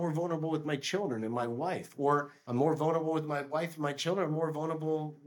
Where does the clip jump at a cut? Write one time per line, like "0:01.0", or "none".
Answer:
0:02.4

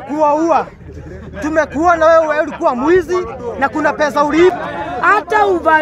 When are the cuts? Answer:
0:04.5

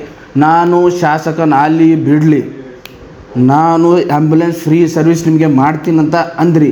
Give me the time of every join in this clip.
none

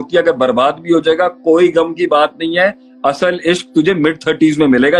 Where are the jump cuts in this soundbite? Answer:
none

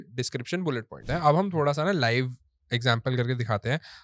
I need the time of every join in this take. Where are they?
0:01.0

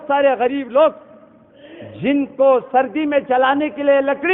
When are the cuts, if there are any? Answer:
none

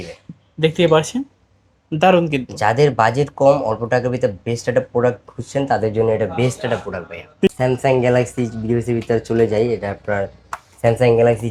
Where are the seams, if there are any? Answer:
0:07.5

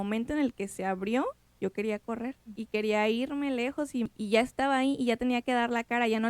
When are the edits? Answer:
0:01.5
0:02.5
0:04.1

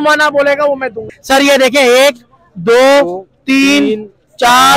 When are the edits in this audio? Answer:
0:01.1

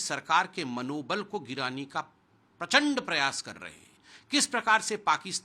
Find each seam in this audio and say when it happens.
none

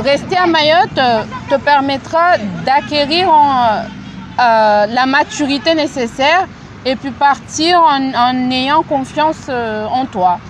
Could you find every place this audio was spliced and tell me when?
none

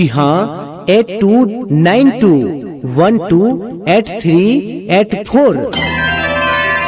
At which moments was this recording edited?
0:05.7

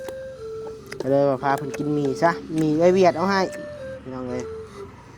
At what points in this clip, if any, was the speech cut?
none

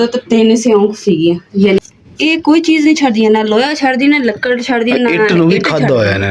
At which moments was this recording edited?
0:01.8

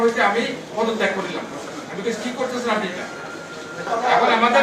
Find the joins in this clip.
0:03.7

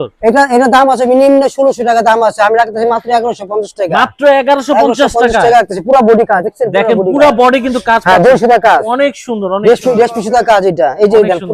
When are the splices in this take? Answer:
none

